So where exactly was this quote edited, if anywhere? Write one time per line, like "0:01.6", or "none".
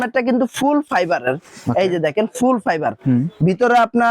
none